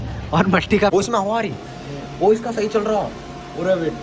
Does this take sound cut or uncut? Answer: cut